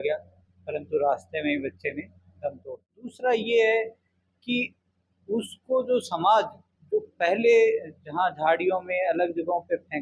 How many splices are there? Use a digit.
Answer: 1